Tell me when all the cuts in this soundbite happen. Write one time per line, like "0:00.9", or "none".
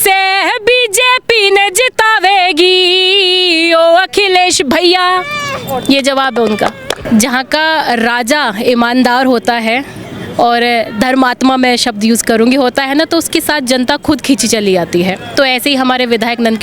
0:07.0